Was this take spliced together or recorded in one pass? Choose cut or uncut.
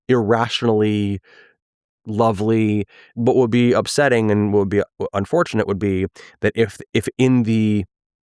cut